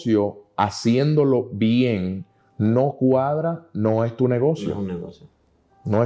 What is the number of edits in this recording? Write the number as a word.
zero